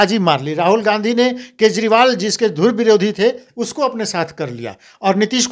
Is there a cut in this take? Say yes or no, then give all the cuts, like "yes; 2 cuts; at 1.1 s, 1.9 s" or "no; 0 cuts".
no; 0 cuts